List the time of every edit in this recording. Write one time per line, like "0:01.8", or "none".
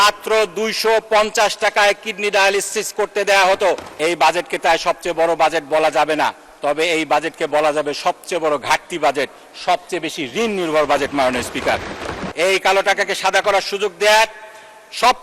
0:03.9
0:12.2